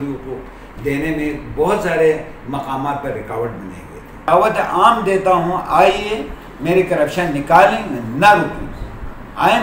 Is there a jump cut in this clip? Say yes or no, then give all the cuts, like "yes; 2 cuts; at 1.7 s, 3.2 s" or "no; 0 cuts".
yes; 1 cut; at 4.3 s